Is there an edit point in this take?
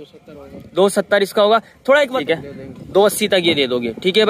yes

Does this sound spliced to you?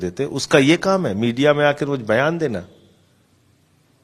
no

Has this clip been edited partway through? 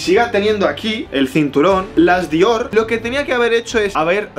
yes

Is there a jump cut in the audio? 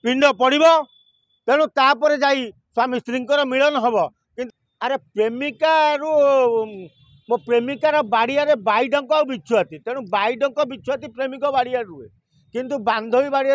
yes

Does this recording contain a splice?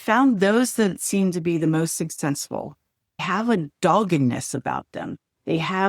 yes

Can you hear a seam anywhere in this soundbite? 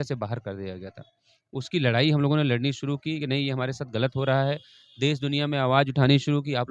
no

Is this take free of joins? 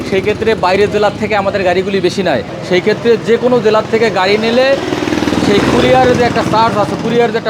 no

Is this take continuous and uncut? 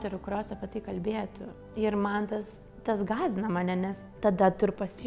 yes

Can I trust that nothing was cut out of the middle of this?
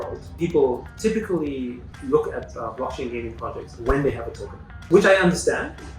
no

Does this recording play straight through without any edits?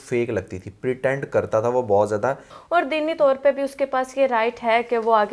no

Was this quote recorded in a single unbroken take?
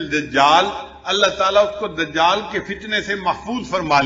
yes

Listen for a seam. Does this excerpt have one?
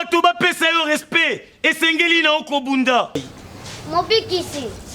yes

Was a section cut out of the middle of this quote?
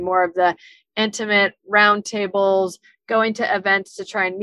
no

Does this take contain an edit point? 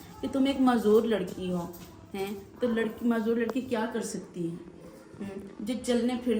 no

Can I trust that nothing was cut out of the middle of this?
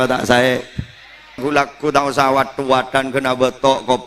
no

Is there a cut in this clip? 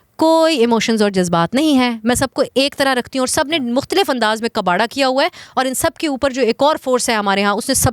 no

